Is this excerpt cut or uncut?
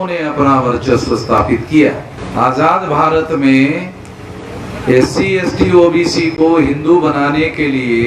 cut